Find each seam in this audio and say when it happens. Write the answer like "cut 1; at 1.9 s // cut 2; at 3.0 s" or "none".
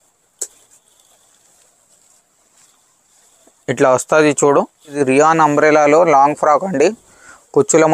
cut 1; at 5.0 s